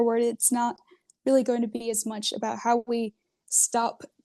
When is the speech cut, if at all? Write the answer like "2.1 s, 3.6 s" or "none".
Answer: none